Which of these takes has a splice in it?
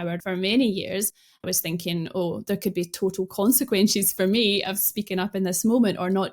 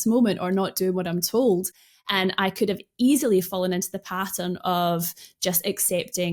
first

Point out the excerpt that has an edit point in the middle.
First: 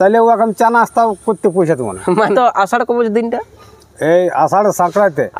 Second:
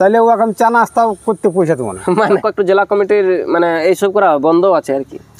second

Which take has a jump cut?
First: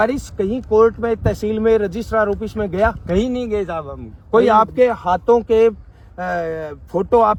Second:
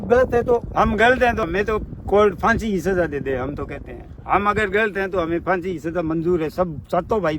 second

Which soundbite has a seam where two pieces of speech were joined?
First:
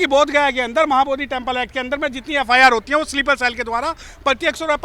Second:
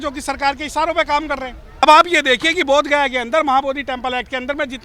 second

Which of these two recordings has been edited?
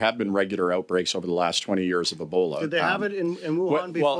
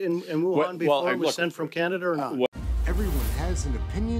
second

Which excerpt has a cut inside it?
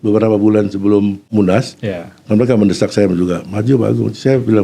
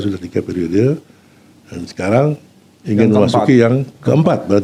first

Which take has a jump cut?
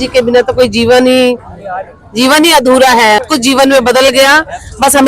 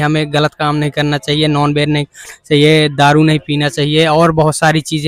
first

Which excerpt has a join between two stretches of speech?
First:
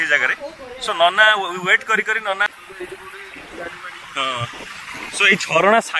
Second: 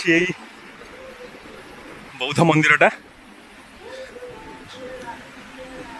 first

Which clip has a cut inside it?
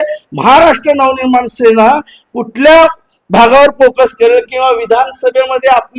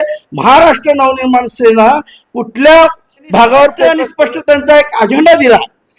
second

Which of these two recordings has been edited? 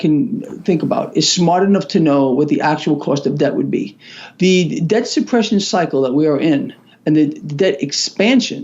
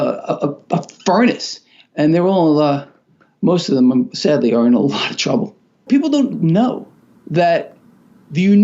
second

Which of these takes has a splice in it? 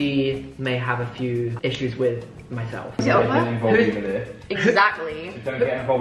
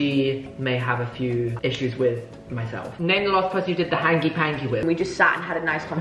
second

